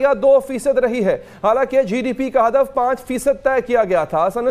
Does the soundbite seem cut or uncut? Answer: uncut